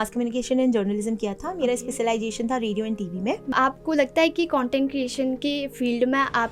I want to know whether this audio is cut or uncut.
cut